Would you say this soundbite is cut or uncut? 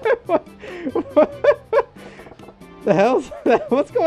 uncut